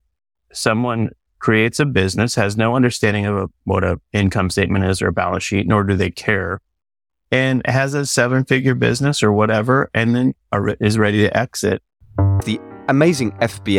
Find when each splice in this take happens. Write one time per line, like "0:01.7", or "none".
0:12.5